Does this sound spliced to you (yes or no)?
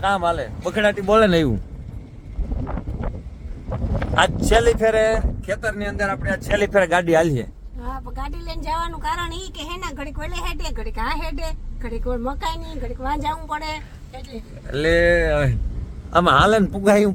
no